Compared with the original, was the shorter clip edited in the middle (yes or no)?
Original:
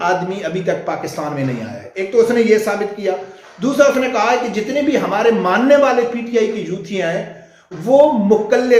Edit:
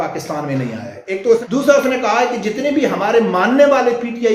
yes